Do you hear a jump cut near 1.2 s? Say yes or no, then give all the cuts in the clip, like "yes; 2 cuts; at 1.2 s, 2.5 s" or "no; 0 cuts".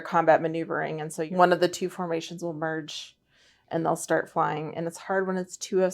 yes; 1 cut; at 1.2 s